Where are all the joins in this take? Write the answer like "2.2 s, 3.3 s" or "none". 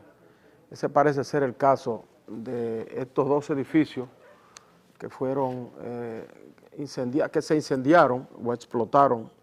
none